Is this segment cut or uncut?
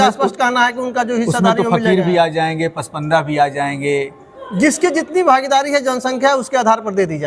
uncut